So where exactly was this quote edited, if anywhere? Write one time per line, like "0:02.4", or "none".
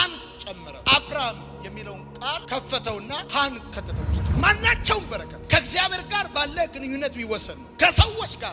0:04.2